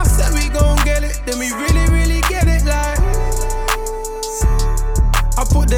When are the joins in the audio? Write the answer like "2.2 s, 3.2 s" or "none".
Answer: none